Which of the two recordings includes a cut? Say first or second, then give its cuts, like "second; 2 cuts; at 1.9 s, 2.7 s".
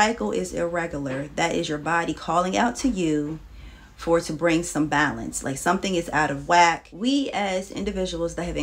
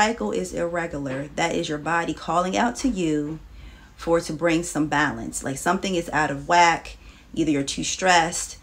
first; 1 cut; at 6.9 s